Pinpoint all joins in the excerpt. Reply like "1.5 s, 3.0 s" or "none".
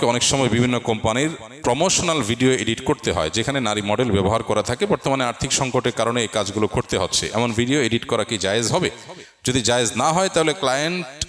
none